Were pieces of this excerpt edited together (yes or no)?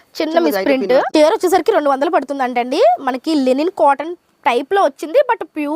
yes